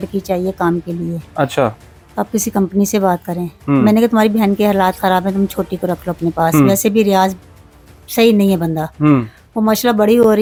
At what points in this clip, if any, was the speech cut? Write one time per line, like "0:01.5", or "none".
none

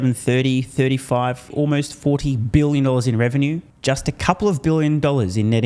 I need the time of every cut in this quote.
0:03.7

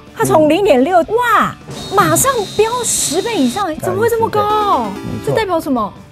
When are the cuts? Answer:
none

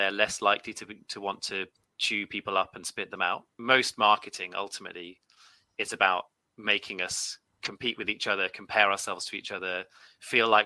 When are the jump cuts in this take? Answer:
0:03.5

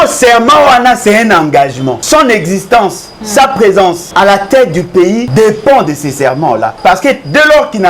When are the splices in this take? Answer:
0:02.0
0:04.0
0:05.3
0:06.7

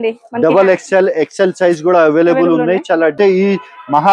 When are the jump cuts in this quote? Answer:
0:03.1

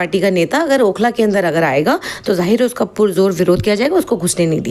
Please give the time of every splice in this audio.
none

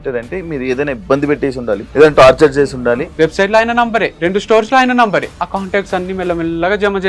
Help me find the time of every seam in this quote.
0:01.9
0:03.1
0:04.1
0:05.4

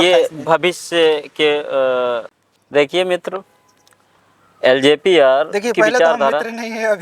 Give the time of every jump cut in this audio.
0:02.3

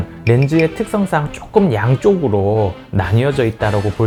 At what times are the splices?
none

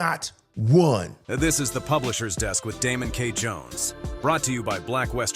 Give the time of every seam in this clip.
0:01.2

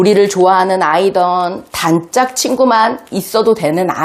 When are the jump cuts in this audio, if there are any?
none

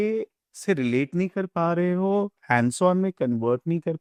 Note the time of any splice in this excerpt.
none

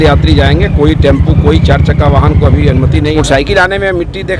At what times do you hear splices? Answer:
0:03.1

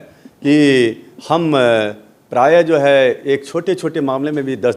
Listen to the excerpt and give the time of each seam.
none

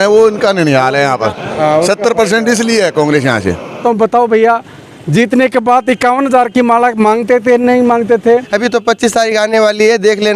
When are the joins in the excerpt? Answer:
0:03.8
0:08.5

